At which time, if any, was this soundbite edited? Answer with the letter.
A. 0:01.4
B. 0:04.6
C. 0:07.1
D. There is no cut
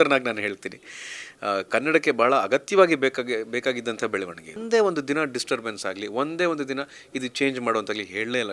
B